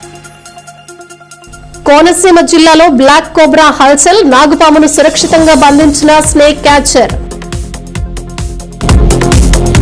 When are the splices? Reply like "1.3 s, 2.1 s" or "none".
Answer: 1.4 s